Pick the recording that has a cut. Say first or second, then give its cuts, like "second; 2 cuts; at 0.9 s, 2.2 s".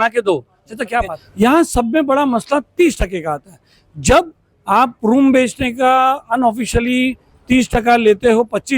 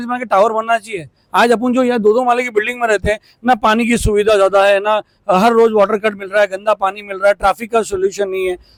first; 1 cut; at 1.2 s